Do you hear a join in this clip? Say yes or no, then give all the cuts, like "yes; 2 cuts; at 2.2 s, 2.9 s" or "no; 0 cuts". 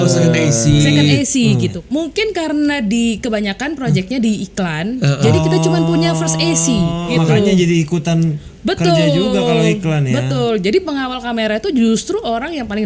yes; 2 cuts; at 1.8 s, 7.1 s